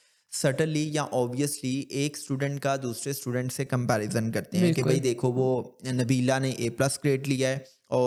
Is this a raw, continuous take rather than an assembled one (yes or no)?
yes